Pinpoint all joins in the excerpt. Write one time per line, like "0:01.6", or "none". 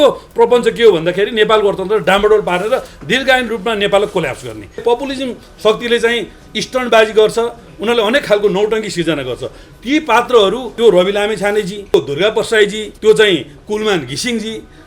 0:04.8
0:10.7
0:11.9
0:12.8

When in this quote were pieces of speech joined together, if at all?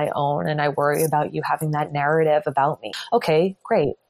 0:02.9

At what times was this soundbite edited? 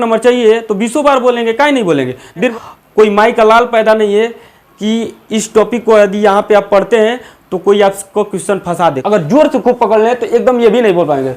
0:02.5
0:09.0

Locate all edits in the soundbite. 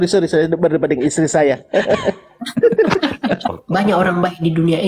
0:03.5

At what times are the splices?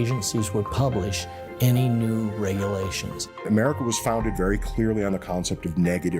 0:03.5

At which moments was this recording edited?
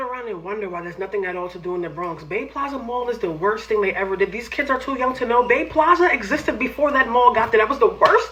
none

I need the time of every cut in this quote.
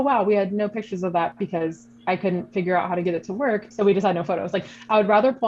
0:03.7

